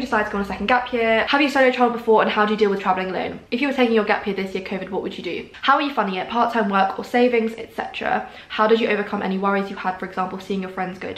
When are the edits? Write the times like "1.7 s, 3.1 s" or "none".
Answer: 1.3 s, 3.4 s, 5.5 s